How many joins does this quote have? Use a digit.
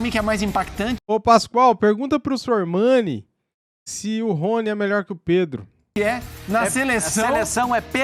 1